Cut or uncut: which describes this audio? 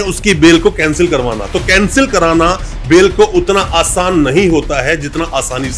uncut